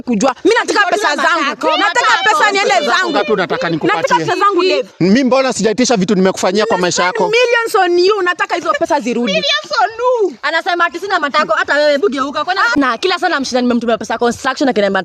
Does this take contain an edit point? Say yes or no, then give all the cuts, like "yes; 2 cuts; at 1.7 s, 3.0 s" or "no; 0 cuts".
yes; 1 cut; at 12.7 s